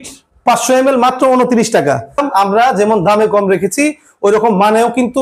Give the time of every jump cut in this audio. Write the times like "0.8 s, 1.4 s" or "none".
2.2 s

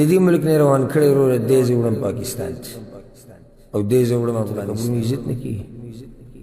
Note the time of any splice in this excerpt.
4.6 s

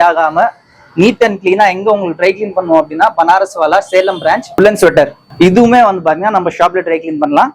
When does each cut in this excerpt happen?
4.5 s

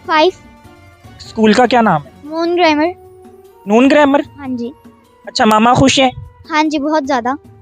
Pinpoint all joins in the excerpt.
4.7 s

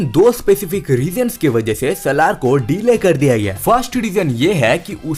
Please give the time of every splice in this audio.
none

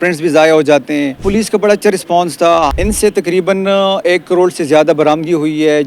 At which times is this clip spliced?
1.2 s, 2.7 s

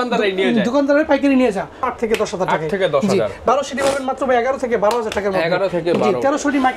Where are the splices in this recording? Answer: 1.9 s

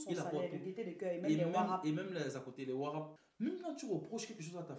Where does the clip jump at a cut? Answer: 3.2 s

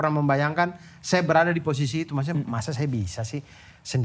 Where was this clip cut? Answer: none

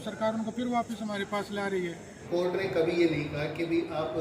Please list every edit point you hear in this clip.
2.2 s

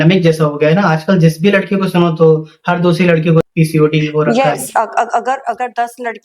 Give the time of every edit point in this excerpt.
3.4 s

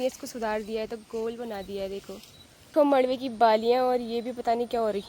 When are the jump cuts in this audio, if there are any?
2.7 s

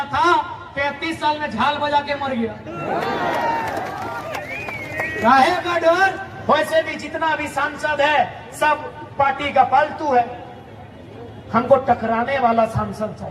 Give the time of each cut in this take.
6.3 s

